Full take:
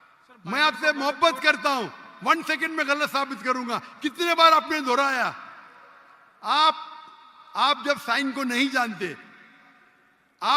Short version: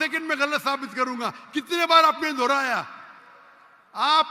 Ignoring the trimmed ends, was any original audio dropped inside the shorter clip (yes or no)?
no